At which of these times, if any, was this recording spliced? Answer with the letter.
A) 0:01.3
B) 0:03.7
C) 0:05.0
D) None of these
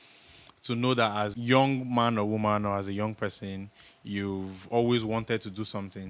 A